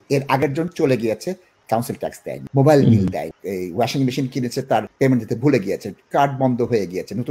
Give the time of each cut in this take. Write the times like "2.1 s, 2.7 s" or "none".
1.9 s, 3.4 s, 4.9 s